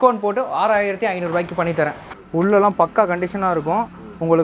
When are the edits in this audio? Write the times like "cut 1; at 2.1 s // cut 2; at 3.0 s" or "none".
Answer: cut 1; at 2.2 s